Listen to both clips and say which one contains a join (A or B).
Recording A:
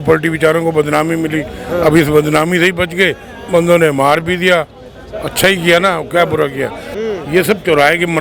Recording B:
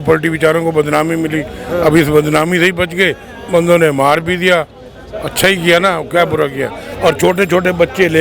B